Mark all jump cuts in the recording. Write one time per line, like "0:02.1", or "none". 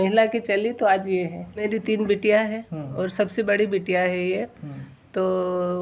0:01.6